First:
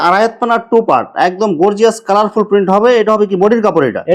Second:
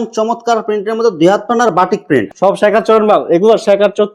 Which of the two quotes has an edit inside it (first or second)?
second